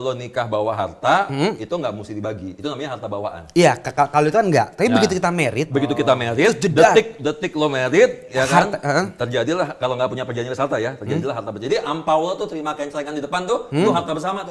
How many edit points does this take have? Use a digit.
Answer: 0